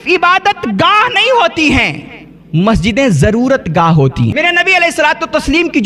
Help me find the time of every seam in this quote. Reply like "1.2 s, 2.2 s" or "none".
4.3 s